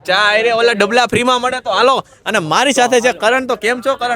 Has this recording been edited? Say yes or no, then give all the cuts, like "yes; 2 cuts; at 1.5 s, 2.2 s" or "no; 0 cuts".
no; 0 cuts